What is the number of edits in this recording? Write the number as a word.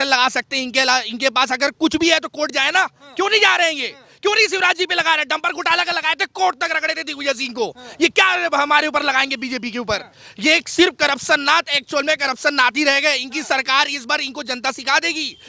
zero